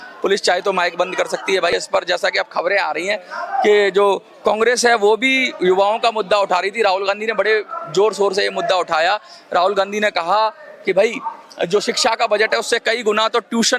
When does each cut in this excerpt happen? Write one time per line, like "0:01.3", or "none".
0:01.7